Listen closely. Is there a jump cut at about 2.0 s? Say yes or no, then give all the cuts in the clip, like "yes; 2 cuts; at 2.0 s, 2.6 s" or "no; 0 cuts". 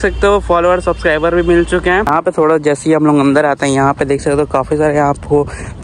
yes; 1 cut; at 2.0 s